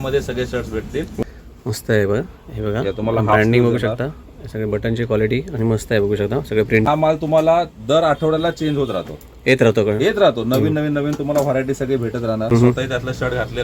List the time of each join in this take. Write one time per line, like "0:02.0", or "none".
0:01.2
0:06.8
0:12.5